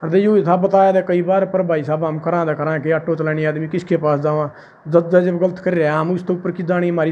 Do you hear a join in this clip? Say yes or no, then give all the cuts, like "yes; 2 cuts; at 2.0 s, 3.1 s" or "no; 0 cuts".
no; 0 cuts